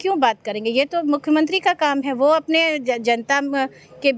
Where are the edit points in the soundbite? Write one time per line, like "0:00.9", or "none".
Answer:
none